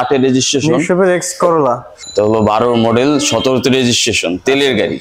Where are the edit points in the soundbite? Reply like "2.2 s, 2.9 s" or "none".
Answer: 1.9 s